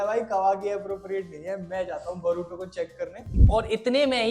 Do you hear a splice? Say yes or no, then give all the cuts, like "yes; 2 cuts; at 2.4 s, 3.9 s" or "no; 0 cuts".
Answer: yes; 1 cut; at 3.3 s